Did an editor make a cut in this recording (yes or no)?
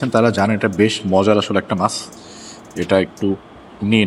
no